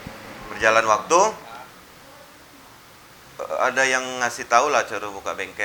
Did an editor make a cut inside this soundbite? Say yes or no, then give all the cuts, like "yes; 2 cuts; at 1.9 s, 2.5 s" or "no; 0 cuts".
no; 0 cuts